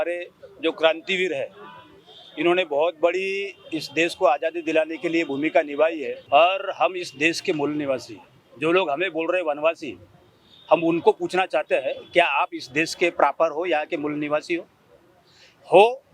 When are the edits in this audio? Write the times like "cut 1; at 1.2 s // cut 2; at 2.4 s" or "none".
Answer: cut 1; at 6.2 s